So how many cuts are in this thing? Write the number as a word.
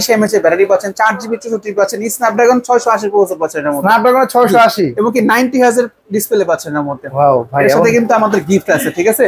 zero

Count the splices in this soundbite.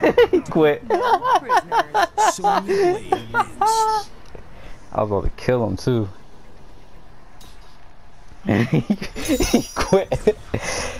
zero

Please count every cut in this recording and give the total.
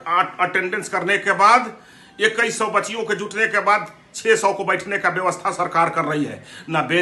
zero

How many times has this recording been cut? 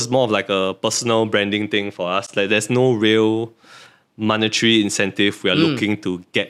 zero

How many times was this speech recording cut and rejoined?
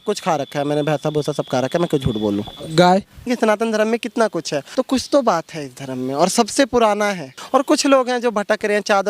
three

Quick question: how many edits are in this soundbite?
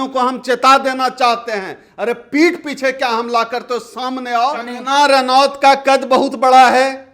one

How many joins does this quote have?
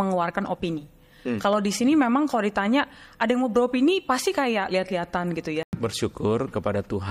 one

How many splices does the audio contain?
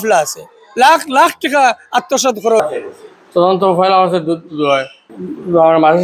one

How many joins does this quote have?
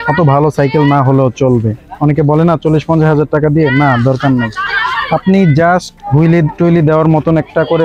one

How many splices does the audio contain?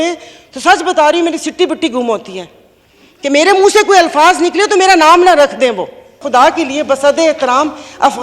one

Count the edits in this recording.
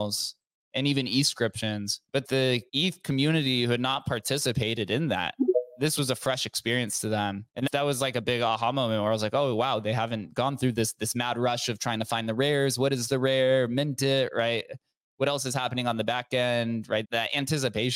four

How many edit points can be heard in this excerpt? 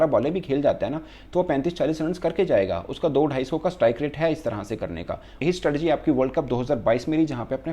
one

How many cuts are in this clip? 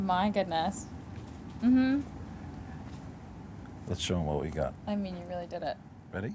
zero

